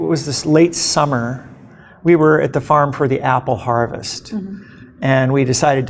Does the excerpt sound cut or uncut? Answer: uncut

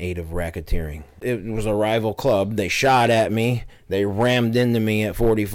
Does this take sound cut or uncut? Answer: cut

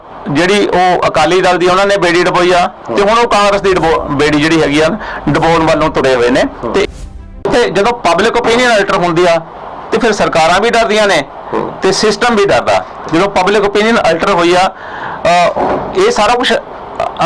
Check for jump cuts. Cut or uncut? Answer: cut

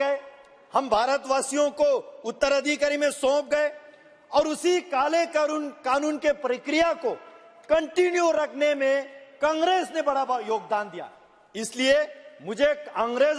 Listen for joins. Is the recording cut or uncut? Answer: uncut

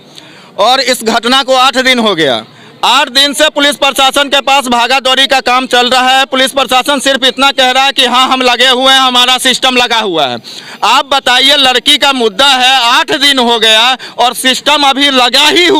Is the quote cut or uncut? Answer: uncut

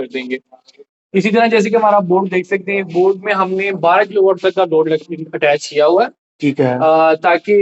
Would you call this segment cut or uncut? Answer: uncut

